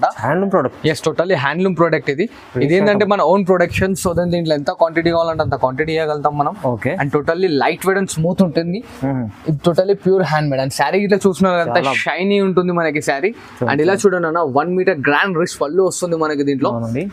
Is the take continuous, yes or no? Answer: yes